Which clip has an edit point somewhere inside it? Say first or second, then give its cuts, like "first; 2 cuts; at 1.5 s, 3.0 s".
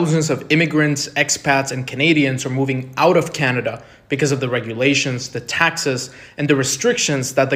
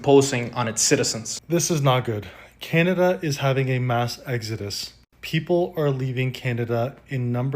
second; 1 cut; at 1.2 s